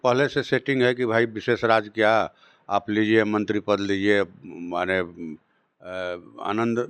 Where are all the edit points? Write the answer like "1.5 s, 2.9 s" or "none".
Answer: none